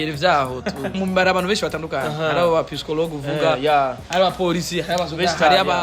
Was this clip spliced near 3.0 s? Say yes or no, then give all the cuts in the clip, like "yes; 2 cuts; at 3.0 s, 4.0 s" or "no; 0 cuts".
no; 1 cut; at 0.9 s